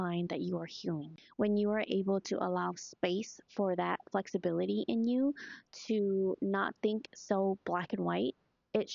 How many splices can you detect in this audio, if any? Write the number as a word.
one